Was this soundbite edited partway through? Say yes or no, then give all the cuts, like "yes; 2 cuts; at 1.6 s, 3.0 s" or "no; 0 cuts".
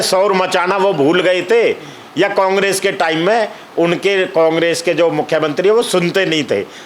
no; 0 cuts